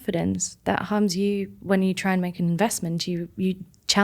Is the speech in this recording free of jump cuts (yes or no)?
no